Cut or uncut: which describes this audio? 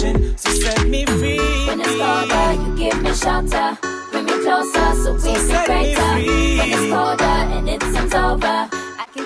uncut